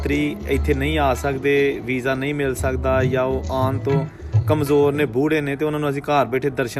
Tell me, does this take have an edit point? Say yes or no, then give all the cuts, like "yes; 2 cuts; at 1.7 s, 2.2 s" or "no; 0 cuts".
no; 0 cuts